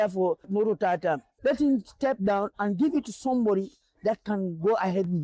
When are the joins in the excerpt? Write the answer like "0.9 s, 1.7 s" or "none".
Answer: none